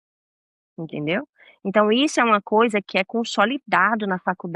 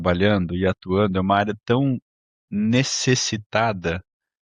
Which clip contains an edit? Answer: first; 1 cut; at 2.9 s

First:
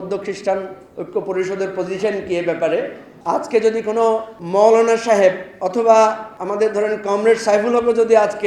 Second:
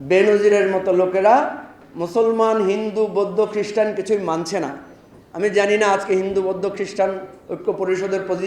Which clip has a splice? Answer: first; 4 cuts; at 3.1 s, 4.3 s, 5.5 s, 6.3 s

